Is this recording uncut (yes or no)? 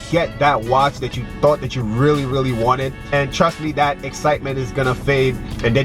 no